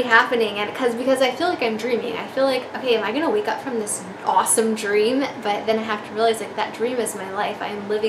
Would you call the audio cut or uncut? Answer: uncut